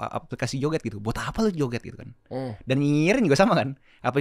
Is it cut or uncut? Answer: uncut